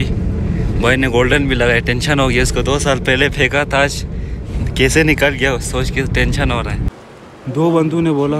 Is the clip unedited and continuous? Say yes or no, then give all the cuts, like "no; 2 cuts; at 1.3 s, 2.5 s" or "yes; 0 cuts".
no; 1 cut; at 7.0 s